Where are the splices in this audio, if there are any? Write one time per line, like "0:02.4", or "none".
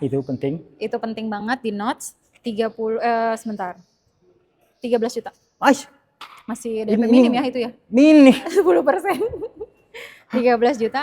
none